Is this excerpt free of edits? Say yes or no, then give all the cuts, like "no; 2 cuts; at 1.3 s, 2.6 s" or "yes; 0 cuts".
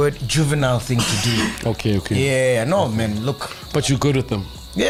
yes; 0 cuts